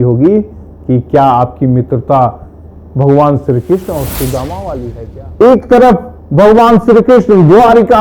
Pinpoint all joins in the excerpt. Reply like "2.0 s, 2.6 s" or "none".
5.0 s